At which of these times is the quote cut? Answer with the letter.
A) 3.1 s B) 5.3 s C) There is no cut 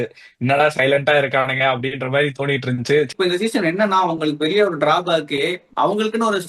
A